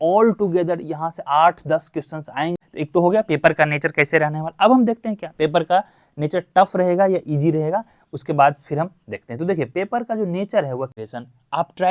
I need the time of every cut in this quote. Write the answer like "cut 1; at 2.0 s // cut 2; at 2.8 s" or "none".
cut 1; at 2.6 s // cut 2; at 11.0 s